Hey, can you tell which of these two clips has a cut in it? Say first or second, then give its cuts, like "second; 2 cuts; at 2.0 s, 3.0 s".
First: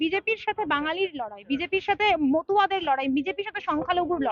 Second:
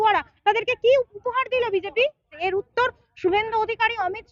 second; 1 cut; at 2.3 s